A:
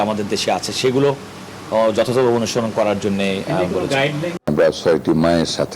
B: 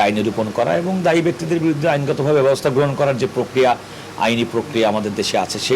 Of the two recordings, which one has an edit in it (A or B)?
A